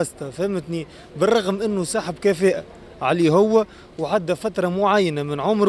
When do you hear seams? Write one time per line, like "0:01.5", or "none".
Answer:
none